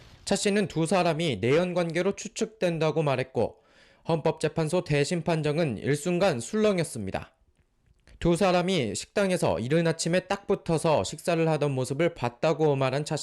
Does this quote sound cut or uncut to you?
cut